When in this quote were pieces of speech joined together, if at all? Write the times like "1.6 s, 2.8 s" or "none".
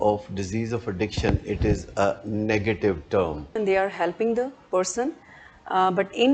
3.5 s